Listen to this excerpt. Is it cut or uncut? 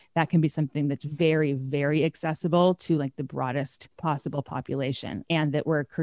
cut